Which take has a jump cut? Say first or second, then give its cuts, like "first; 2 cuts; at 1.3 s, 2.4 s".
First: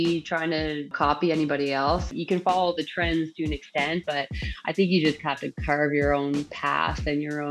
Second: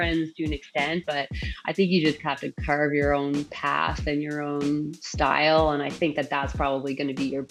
first; 2 cuts; at 0.9 s, 2.1 s